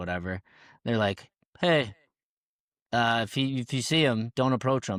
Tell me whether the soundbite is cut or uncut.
uncut